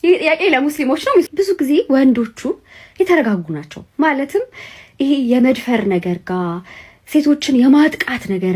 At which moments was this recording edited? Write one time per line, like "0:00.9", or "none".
0:01.3